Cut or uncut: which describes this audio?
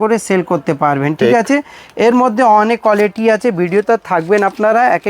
uncut